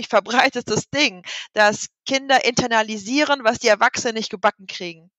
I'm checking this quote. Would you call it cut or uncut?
uncut